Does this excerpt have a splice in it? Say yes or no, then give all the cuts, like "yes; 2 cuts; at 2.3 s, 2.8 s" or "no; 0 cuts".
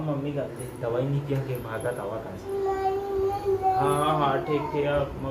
no; 0 cuts